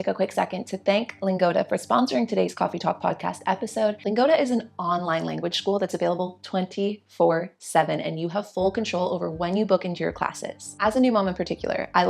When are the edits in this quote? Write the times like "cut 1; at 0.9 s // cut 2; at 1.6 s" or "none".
cut 1; at 4.0 s // cut 2; at 10.7 s